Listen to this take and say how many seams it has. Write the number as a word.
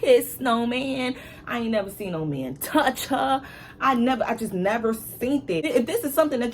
one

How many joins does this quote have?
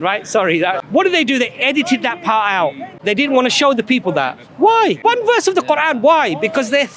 three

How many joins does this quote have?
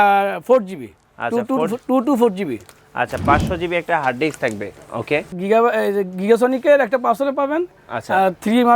two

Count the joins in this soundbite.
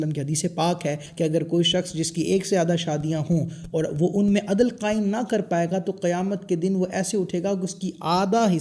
one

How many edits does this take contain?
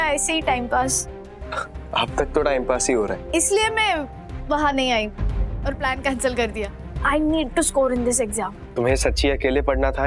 two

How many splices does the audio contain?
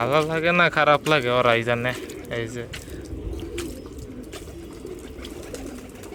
zero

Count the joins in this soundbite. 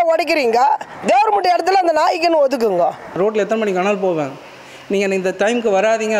one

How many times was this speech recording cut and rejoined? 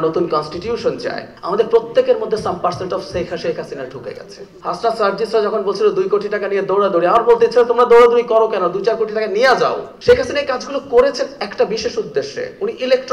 three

